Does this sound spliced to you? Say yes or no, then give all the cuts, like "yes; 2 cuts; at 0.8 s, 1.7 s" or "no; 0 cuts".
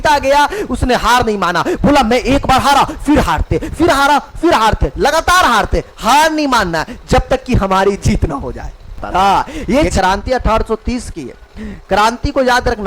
yes; 1 cut; at 9.6 s